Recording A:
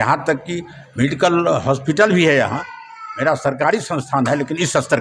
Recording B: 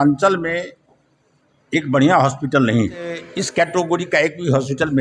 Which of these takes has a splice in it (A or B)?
B